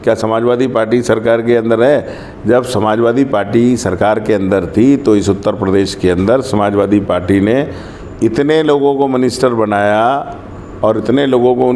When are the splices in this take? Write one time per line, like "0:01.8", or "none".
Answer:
none